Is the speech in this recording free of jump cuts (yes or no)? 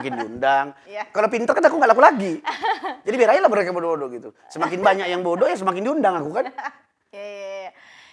yes